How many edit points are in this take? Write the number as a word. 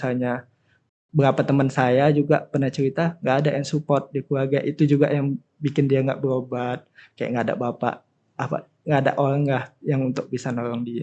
zero